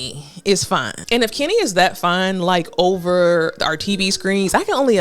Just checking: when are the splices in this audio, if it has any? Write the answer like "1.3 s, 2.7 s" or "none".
0.9 s